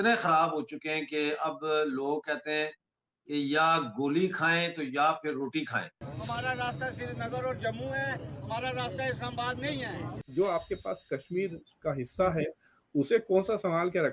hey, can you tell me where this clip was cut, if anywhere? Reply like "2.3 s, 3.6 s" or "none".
6.1 s, 10.2 s